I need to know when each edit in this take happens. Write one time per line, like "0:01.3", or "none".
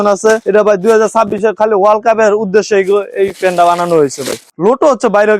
0:04.5